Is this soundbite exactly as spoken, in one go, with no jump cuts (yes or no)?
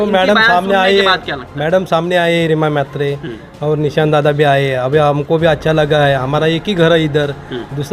yes